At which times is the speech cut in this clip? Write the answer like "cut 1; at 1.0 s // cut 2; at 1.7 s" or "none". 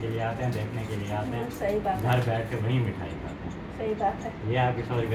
none